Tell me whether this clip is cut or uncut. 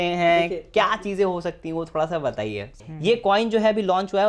cut